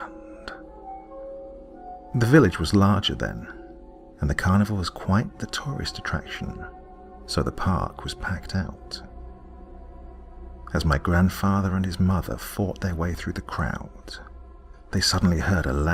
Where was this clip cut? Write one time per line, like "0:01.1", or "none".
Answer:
0:11.6

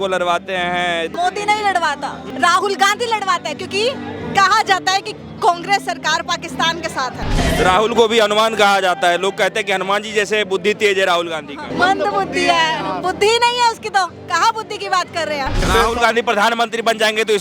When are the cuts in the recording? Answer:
0:01.1
0:02.2
0:07.3
0:11.6
0:15.7

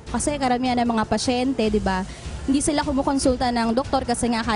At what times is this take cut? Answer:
none

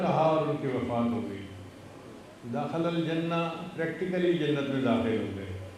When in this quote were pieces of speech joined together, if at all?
none

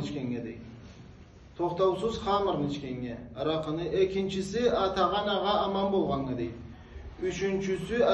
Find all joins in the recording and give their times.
none

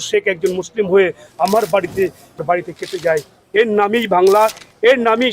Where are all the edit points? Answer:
0:02.4

